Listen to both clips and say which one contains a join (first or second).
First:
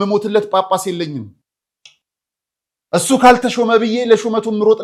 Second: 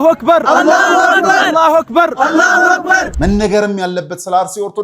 second